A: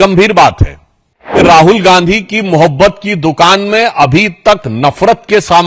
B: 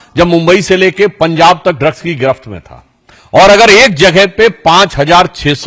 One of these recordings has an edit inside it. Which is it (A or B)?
A